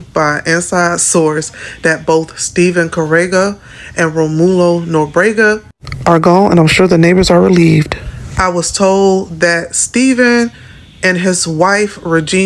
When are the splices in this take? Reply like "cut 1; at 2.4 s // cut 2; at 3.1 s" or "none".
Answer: none